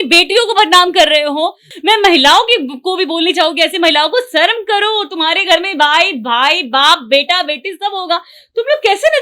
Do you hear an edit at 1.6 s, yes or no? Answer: yes